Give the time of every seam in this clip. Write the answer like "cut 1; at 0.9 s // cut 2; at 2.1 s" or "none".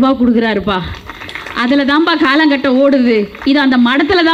none